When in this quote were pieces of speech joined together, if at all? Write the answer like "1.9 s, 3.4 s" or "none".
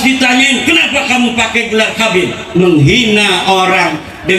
2.4 s